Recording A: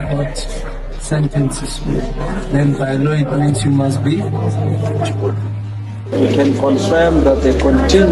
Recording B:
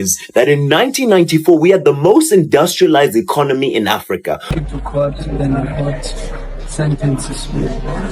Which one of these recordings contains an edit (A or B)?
B